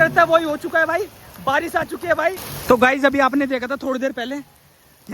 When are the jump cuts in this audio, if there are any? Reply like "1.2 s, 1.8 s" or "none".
2.5 s